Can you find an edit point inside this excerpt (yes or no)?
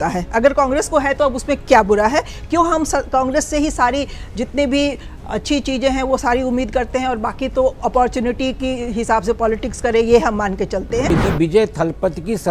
yes